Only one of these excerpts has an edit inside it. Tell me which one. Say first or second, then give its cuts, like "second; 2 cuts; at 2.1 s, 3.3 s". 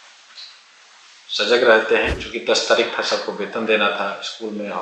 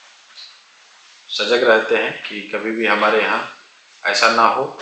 first; 1 cut; at 2.2 s